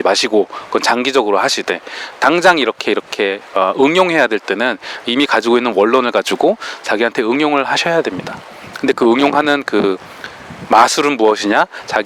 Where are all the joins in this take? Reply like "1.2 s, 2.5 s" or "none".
none